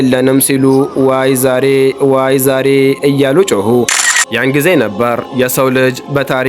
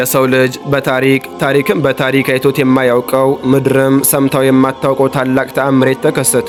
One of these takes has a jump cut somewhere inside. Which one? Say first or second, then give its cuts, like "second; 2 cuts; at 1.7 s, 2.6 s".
first; 1 cut; at 4.1 s